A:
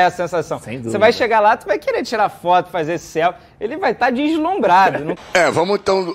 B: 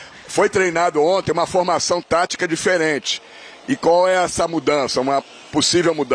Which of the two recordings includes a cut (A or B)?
A